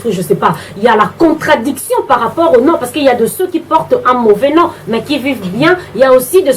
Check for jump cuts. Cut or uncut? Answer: uncut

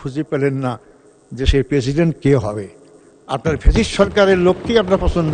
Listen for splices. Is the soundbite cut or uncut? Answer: uncut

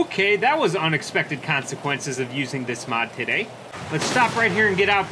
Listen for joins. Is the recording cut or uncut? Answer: cut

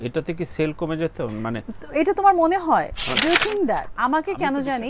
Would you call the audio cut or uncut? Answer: cut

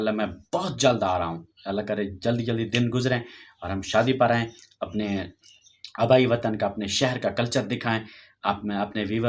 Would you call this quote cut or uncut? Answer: uncut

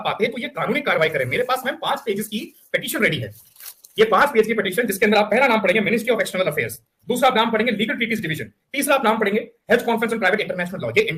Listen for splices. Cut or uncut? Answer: uncut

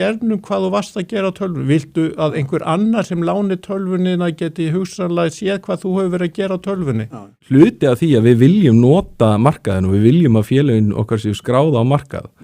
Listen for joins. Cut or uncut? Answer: cut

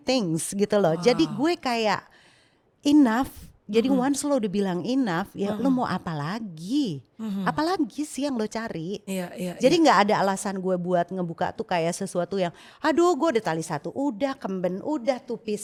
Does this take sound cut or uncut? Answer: uncut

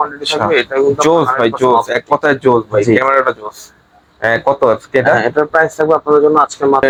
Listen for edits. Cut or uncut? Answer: uncut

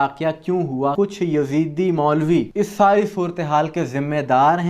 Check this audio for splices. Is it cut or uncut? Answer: cut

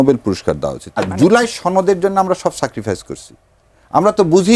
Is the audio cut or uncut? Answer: cut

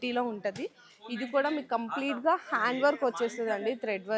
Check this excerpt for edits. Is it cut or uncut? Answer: uncut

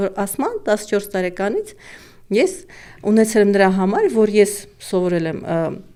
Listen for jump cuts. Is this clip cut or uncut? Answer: uncut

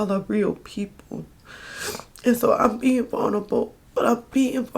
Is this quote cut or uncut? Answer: cut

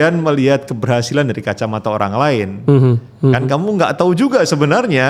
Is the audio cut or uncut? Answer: uncut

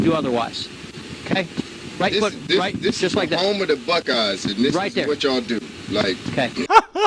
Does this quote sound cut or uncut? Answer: uncut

